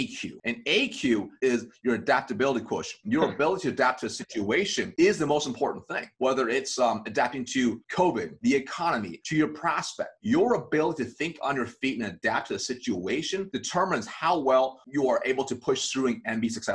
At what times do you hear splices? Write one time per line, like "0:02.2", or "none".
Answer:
none

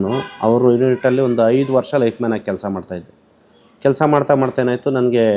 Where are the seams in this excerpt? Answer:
none

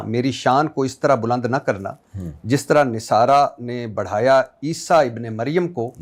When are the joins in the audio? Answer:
none

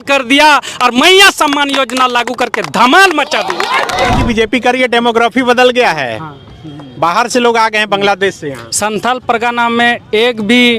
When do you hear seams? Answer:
0:04.2

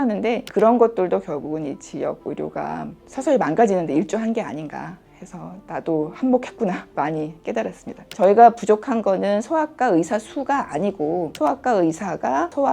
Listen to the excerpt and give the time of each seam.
0:08.0

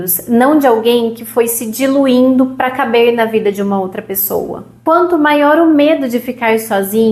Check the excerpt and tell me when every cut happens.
0:04.7

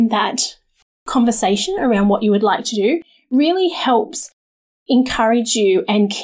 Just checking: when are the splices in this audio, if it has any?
none

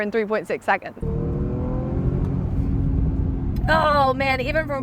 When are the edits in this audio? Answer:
0:01.0

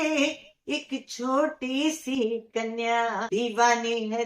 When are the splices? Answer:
0:03.3

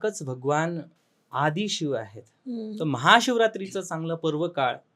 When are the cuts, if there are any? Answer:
none

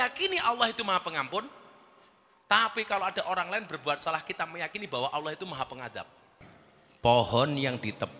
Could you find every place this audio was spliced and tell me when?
0:06.4

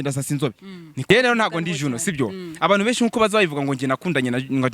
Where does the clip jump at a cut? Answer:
0:01.0

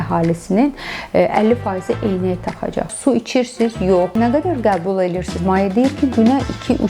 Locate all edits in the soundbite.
0:02.9
0:04.1

